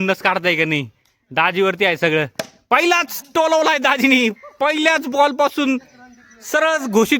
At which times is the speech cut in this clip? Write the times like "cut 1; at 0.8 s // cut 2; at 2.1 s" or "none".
none

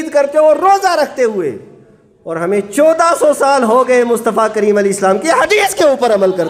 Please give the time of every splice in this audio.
none

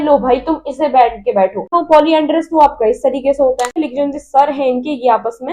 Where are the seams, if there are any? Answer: cut 1; at 1.7 s // cut 2; at 3.8 s

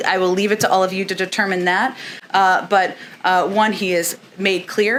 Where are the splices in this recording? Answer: none

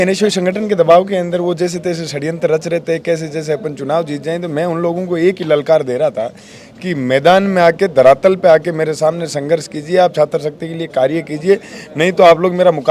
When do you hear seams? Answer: none

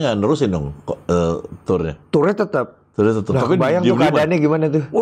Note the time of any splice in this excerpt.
none

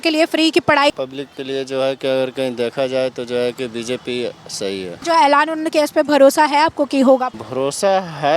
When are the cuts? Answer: cut 1; at 0.9 s // cut 2; at 5.0 s // cut 3; at 7.4 s

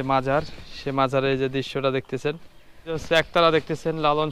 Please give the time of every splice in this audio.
cut 1; at 3.0 s

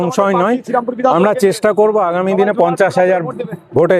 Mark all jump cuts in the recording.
none

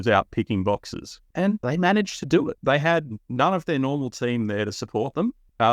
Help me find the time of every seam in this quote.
cut 1; at 1.4 s // cut 2; at 2.6 s

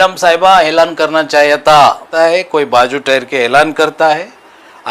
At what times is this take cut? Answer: cut 1; at 2.1 s

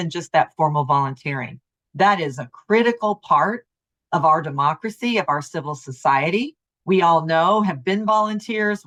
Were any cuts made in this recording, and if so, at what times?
none

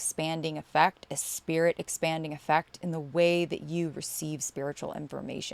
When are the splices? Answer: none

